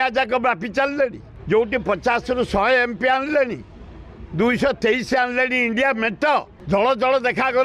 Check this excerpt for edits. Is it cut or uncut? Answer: cut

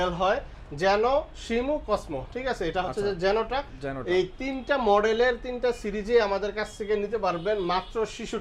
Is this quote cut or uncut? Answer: uncut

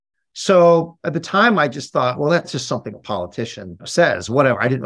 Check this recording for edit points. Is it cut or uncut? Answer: cut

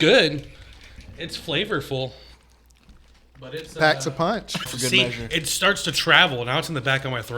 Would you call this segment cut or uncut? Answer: cut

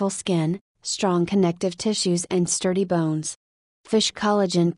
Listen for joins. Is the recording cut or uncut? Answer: cut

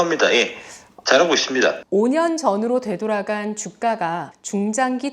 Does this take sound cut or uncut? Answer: cut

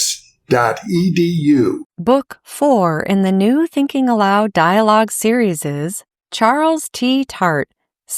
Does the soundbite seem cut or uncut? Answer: cut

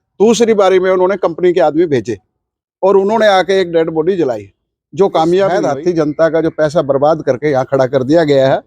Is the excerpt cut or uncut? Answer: cut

